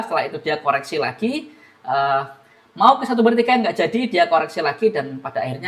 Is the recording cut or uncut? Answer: uncut